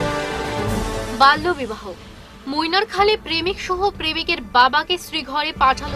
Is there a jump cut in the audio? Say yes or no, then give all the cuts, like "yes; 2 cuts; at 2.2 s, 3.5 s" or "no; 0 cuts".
no; 0 cuts